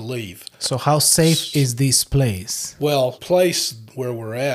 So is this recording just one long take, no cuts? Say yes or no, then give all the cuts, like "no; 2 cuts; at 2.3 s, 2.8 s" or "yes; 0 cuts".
no; 1 cut; at 3.2 s